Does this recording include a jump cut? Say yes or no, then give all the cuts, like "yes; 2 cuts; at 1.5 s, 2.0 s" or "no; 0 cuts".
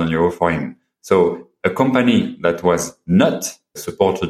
no; 0 cuts